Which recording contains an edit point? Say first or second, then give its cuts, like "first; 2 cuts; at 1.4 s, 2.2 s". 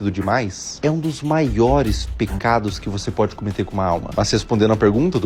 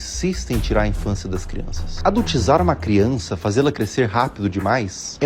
second; 1 cut; at 2.0 s